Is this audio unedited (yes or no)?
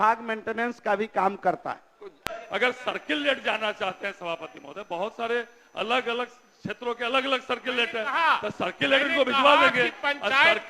no